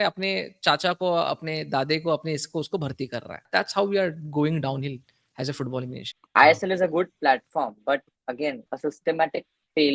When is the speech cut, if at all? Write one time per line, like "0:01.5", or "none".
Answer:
0:03.4
0:06.1
0:08.7